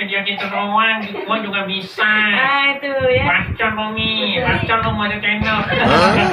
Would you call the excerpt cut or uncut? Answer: cut